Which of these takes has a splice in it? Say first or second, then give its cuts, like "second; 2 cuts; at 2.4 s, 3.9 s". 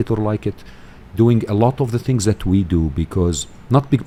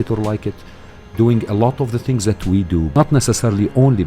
second; 1 cut; at 2.9 s